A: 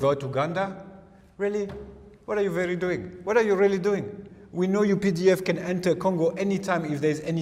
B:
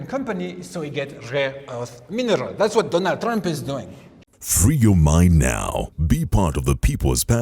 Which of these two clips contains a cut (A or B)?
B